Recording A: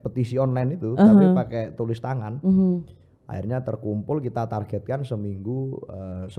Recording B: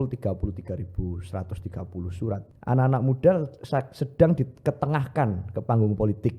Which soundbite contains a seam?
B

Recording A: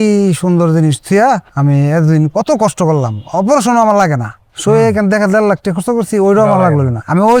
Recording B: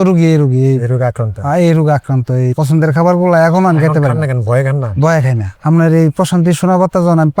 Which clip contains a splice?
B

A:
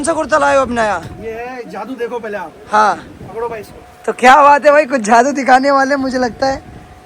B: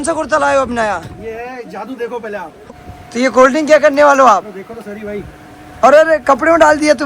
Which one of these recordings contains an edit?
B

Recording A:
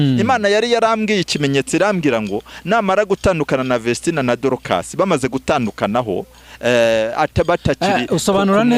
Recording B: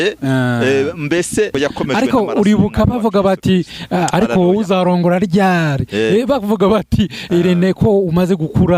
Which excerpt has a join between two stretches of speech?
B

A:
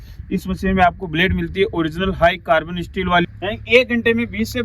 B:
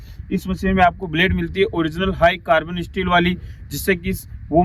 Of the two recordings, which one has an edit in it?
A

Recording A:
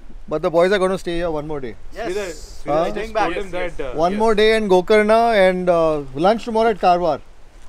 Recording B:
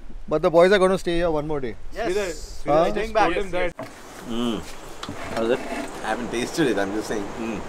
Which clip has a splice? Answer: B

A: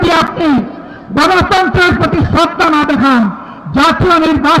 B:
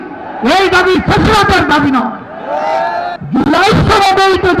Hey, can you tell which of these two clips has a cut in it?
B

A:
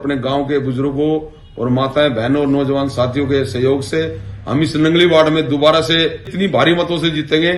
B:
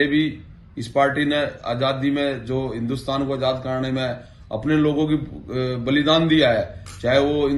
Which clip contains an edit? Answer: A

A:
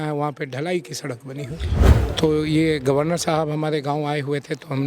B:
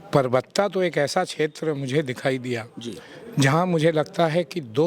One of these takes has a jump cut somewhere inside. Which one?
A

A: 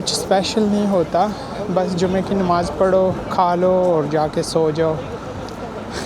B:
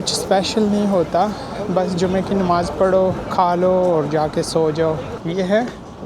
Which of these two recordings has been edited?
B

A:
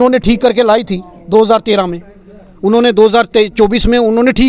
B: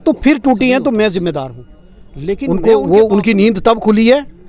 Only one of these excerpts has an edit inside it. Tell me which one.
B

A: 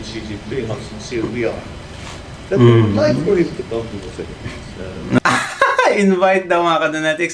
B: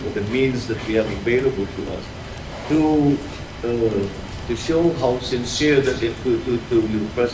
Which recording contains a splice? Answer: A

